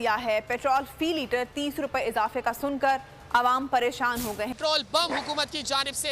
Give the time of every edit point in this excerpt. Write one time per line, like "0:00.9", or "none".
0:04.6